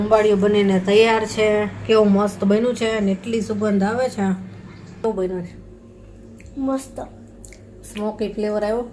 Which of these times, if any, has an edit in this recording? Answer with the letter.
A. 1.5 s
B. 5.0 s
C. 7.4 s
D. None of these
B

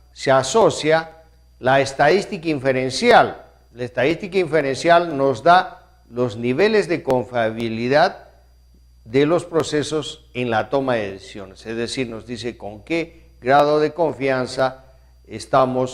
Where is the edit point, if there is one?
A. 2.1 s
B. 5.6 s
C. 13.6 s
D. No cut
A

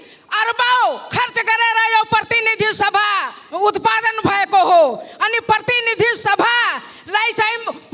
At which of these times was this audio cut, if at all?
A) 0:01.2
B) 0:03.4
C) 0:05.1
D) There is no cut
B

